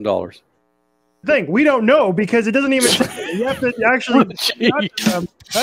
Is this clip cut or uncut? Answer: cut